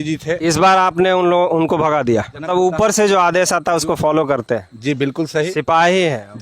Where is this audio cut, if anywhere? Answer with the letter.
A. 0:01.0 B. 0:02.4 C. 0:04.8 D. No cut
B